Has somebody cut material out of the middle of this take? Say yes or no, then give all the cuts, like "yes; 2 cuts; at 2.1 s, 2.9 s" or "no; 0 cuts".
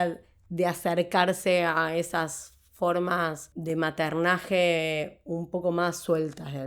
yes; 1 cut; at 3.5 s